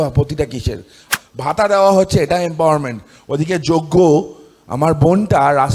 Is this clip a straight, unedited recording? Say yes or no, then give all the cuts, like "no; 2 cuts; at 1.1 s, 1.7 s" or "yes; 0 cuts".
no; 1 cut; at 1.0 s